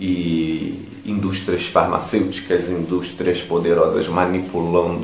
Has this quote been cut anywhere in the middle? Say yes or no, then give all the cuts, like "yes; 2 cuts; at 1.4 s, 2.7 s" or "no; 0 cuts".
no; 0 cuts